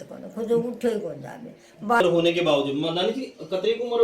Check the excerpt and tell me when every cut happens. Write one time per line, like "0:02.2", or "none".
0:02.0